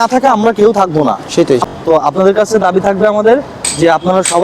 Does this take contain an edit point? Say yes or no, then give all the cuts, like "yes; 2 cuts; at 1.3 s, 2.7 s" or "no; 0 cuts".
yes; 1 cut; at 1.6 s